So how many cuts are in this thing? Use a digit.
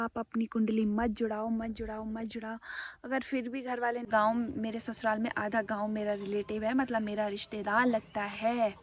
1